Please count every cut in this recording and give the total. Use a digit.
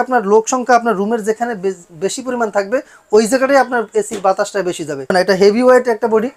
1